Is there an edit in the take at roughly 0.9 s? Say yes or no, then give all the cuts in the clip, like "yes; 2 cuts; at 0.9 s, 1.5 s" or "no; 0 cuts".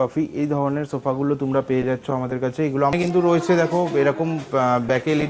no; 1 cut; at 2.9 s